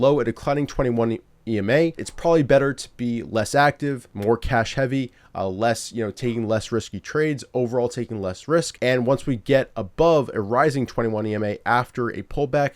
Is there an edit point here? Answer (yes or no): yes